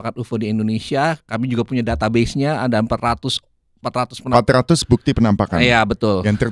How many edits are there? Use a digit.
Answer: 0